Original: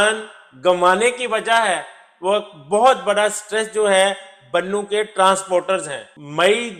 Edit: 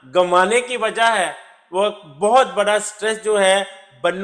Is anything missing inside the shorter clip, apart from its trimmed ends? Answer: no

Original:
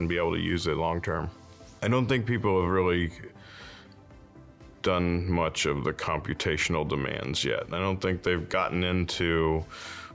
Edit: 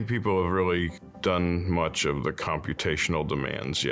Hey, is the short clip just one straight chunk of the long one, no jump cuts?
no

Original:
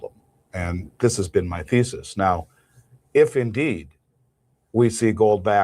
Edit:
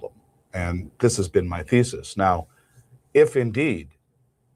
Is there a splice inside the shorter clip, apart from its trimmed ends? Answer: no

